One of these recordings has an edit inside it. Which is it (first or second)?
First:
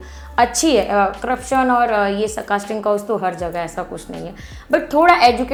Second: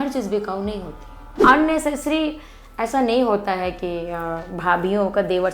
second